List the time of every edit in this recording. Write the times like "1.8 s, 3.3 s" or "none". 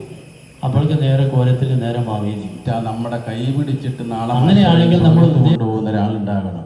2.6 s, 4.4 s, 5.6 s